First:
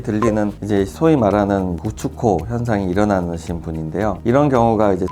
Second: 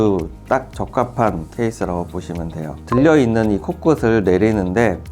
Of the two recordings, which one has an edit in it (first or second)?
second